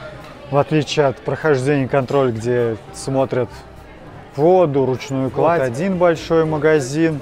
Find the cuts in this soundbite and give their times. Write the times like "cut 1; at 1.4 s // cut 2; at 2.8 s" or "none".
cut 1; at 5.6 s